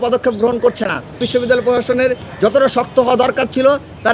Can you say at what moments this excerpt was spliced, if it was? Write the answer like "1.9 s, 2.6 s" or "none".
1.3 s

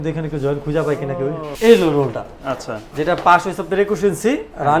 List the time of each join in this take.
1.4 s

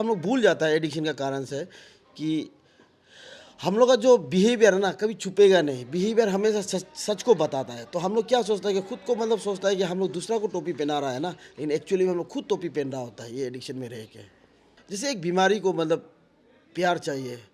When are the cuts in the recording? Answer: 14.7 s

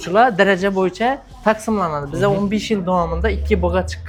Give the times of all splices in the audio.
none

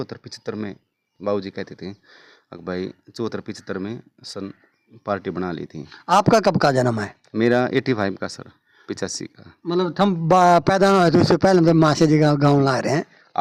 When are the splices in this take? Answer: none

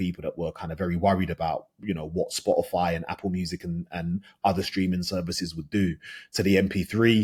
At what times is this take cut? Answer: none

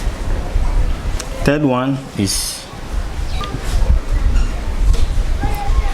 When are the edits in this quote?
1.2 s, 3.4 s

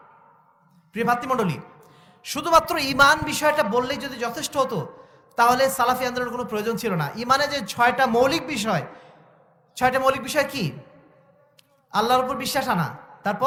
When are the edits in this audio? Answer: none

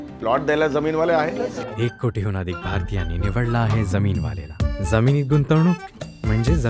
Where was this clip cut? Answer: 1.6 s

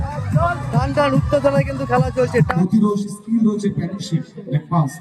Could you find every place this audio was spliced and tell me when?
2.5 s

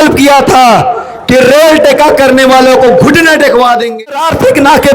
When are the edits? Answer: 4.0 s

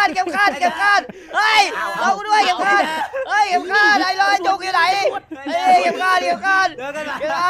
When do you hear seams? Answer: none

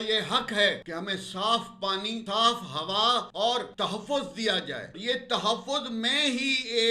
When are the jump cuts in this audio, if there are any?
0.9 s, 2.2 s, 3.5 s, 4.9 s

